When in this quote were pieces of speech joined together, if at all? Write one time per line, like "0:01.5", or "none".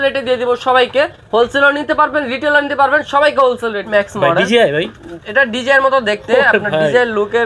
0:03.8